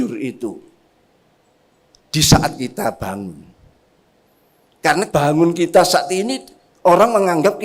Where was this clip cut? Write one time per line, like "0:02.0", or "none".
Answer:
0:05.1